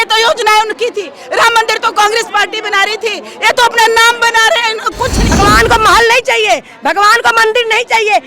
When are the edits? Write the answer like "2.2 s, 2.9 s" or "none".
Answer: 5.4 s